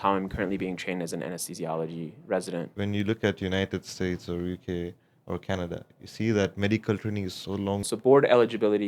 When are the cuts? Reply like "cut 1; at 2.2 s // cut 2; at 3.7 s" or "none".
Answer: cut 1; at 2.7 s // cut 2; at 7.8 s

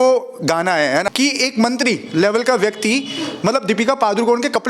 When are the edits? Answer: cut 1; at 1.1 s

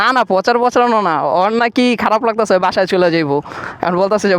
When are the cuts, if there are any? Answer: none

